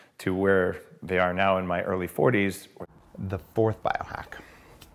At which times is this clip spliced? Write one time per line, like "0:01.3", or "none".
0:02.7